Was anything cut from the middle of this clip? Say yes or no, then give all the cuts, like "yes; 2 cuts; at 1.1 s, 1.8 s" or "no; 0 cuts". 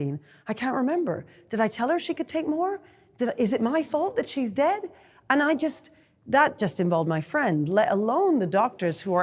no; 0 cuts